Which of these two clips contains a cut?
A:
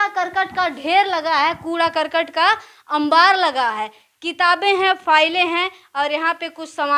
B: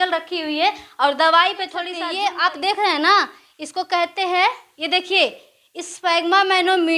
B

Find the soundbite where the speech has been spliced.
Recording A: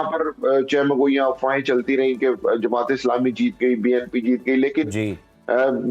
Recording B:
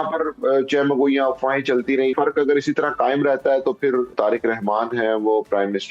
B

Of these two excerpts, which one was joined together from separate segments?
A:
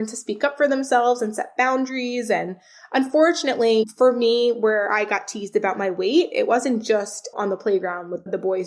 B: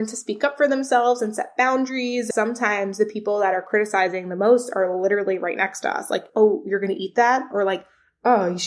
B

